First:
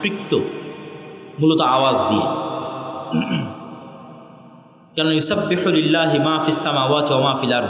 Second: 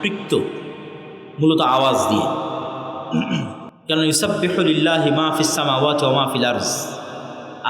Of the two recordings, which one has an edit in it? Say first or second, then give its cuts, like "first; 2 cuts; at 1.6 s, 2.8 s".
second; 1 cut; at 3.7 s